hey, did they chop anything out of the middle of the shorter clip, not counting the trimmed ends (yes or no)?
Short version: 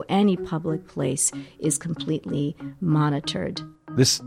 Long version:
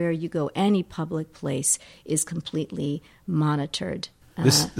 no